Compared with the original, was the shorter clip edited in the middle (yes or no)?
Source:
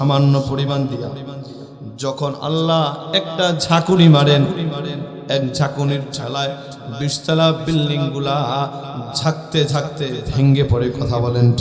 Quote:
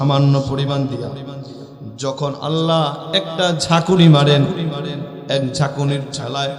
no